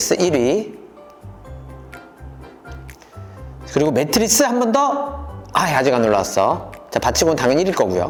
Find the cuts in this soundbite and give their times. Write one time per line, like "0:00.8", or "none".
none

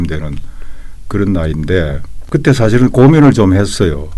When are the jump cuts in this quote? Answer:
0:02.1

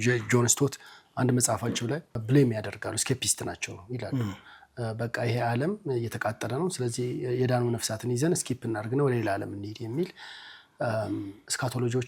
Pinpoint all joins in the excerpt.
0:02.2

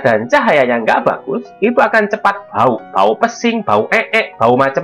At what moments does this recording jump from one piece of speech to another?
none

